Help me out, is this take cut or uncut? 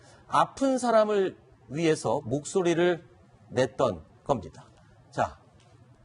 cut